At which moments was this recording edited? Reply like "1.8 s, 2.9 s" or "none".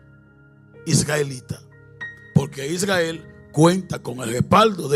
none